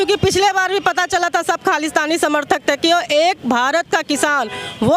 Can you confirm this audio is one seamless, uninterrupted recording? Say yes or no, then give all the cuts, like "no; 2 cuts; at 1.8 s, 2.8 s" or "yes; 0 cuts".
yes; 0 cuts